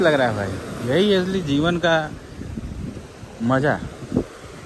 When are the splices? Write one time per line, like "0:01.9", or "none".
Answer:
none